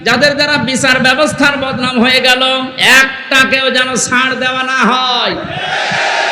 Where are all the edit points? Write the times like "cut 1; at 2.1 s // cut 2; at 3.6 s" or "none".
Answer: none